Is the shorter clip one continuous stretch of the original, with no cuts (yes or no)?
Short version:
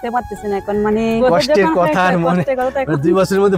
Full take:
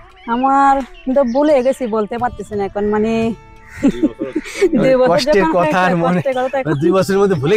no